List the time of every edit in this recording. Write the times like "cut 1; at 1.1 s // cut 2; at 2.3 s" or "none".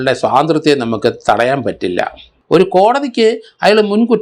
cut 1; at 2.3 s